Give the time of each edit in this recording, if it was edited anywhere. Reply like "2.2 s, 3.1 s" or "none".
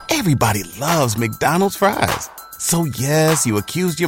none